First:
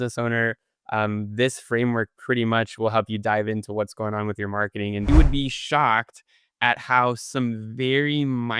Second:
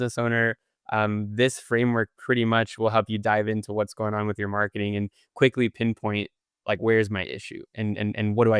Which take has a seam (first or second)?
first